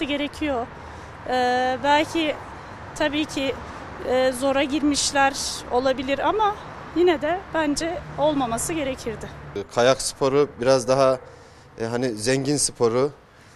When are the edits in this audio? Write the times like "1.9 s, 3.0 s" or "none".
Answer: 9.6 s